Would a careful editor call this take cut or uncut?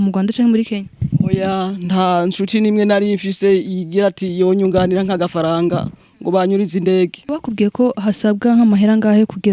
cut